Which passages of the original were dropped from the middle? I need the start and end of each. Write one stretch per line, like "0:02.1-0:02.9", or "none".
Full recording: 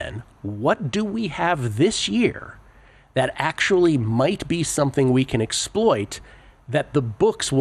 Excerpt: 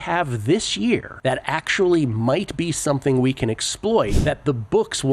0:02.4-0:03.0
0:06.1-0:06.6